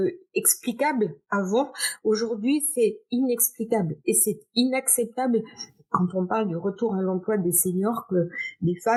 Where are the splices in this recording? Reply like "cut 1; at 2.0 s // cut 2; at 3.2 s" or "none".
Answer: none

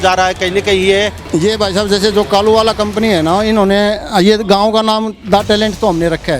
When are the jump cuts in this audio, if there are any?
cut 1; at 1.2 s

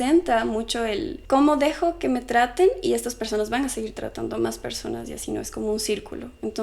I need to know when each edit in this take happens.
cut 1; at 1.1 s

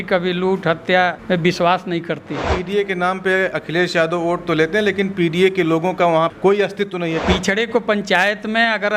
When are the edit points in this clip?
cut 1; at 2.5 s // cut 2; at 7.2 s

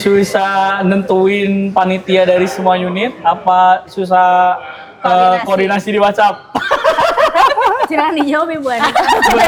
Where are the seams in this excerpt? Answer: none

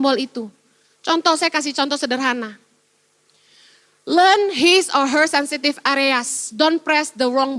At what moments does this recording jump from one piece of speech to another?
none

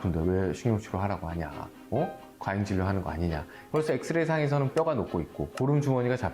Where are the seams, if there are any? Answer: cut 1; at 3.6 s // cut 2; at 4.9 s

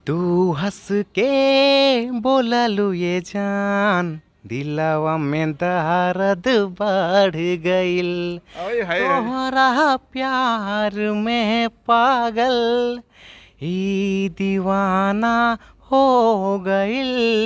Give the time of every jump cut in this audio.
none

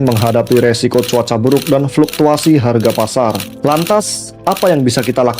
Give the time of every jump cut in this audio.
none

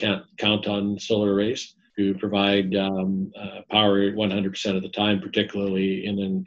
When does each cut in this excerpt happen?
cut 1; at 1.8 s

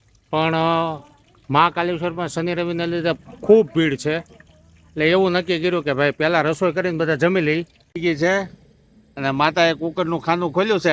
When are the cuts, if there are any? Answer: cut 1; at 7.8 s

